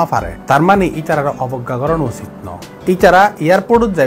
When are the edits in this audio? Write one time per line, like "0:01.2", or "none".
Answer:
none